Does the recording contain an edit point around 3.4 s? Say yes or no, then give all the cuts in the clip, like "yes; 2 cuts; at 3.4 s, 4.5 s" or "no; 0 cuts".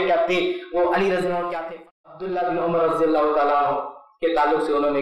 no; 1 cut; at 1.8 s